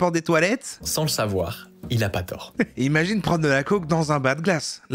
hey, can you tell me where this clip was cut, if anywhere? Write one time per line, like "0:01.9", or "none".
0:02.5